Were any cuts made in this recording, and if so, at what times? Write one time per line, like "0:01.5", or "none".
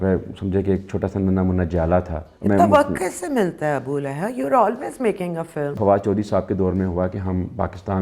0:02.2
0:05.7